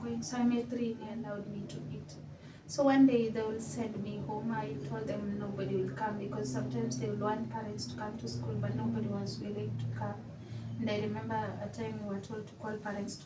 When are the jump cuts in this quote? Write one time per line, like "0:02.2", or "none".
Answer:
0:01.1